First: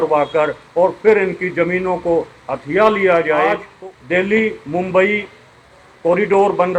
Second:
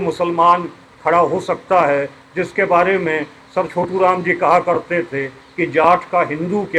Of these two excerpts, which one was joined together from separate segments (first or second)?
first